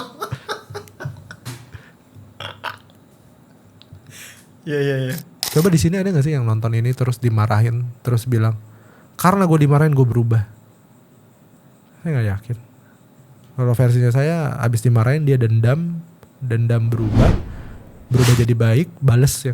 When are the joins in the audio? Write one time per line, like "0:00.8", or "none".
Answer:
0:05.3